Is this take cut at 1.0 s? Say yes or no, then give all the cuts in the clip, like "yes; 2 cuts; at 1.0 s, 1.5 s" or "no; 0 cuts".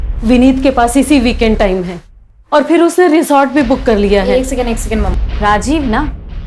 no; 1 cut; at 5.2 s